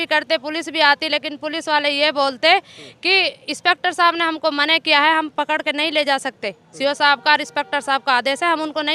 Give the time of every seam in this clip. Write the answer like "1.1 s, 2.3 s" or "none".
none